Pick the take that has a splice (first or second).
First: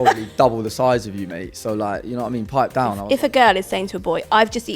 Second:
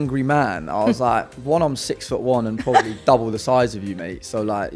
first